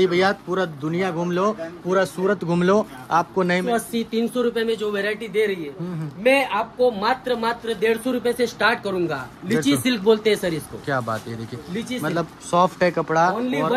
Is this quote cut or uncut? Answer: cut